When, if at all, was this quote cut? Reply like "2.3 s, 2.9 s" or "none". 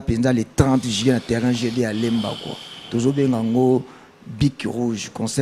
none